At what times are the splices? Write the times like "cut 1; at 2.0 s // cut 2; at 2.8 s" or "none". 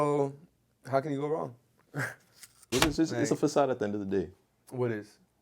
cut 1; at 2.6 s